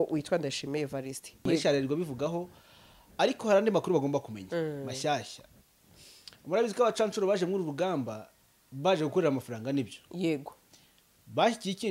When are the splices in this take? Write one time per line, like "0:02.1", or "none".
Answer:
0:01.4